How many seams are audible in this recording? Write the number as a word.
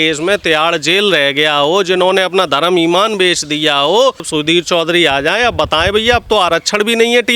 one